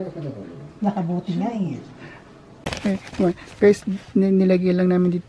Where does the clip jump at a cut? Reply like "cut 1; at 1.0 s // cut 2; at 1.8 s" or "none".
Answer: cut 1; at 2.6 s